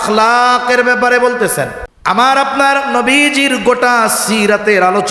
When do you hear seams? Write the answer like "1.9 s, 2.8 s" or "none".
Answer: 1.9 s

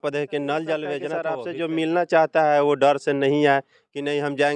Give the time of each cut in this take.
1.3 s

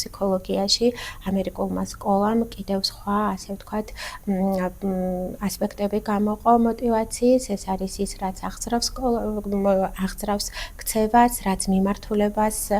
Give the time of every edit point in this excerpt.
none

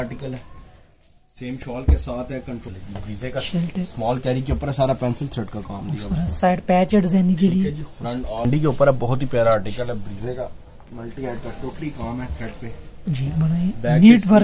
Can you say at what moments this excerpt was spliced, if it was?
2.6 s, 8.4 s

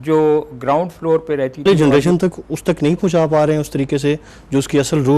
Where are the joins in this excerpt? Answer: 1.7 s

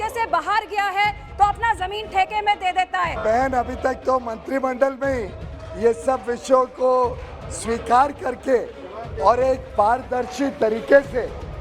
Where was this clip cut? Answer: 3.2 s

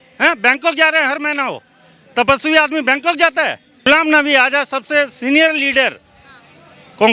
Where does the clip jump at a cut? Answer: 3.9 s

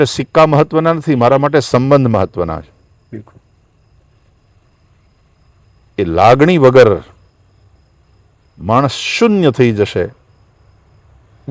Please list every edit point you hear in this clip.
none

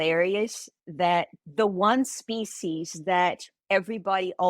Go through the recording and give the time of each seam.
1.4 s

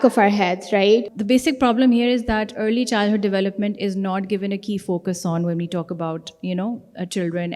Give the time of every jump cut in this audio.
1.1 s

